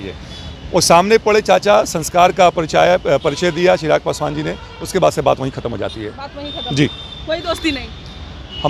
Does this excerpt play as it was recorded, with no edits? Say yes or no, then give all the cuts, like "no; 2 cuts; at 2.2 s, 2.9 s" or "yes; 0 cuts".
yes; 0 cuts